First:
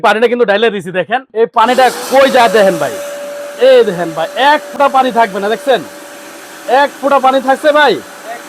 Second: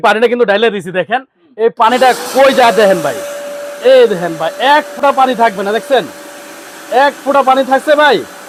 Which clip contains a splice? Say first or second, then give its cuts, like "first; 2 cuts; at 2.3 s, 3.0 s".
first; 1 cut; at 1.2 s